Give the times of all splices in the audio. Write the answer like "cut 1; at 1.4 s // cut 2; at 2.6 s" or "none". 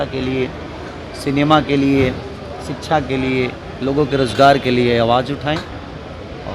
none